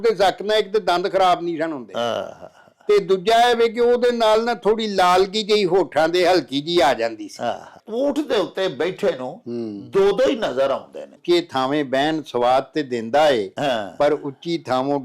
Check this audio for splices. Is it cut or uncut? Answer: cut